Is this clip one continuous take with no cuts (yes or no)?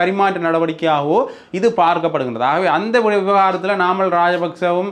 yes